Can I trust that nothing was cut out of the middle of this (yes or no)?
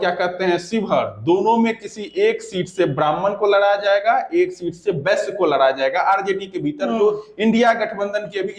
yes